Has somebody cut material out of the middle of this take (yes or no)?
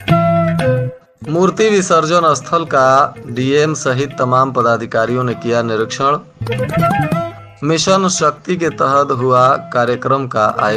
yes